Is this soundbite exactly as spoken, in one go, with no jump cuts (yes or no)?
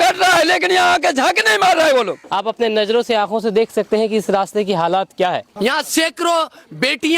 no